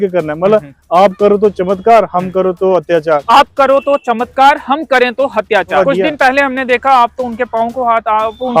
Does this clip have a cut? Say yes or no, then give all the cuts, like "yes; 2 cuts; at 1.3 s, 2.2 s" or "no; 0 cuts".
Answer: yes; 2 cuts; at 3.2 s, 5.8 s